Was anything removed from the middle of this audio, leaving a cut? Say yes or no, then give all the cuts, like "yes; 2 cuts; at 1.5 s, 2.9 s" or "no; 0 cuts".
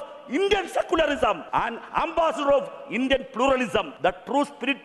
yes; 2 cuts; at 1.4 s, 3.9 s